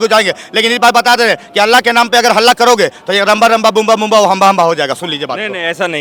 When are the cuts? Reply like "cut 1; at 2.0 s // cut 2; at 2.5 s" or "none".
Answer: none